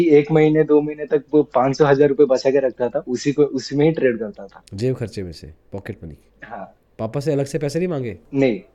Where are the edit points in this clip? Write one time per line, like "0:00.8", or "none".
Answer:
none